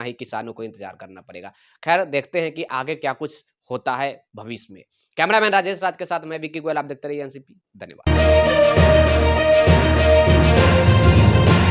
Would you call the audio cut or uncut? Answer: uncut